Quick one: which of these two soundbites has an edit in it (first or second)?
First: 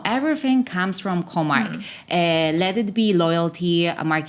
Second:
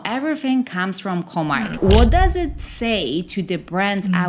second